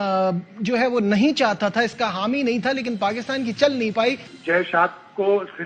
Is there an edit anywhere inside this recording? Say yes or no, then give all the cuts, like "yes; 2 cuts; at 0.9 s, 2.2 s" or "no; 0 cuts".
yes; 1 cut; at 4.3 s